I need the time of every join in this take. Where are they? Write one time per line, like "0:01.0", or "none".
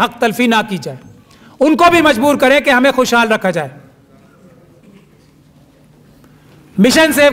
none